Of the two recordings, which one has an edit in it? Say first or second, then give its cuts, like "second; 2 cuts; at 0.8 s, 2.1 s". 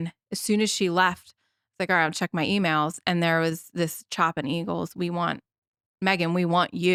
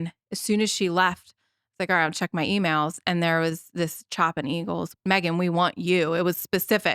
second; 1 cut; at 4.9 s